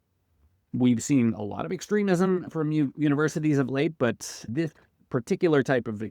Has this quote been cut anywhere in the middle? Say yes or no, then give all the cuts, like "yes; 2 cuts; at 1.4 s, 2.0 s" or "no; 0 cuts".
yes; 2 cuts; at 2.5 s, 4.5 s